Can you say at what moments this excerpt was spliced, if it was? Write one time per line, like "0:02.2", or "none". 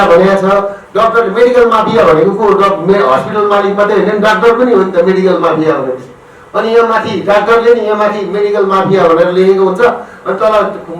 none